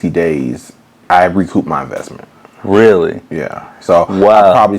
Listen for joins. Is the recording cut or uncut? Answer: cut